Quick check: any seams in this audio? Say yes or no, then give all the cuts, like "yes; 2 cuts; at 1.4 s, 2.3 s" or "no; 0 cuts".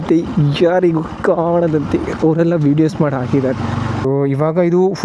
yes; 1 cut; at 4.0 s